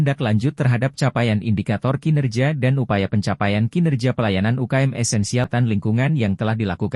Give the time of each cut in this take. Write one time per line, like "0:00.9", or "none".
0:05.5